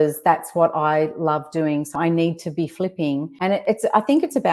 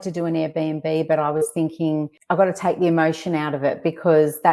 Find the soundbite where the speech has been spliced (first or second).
first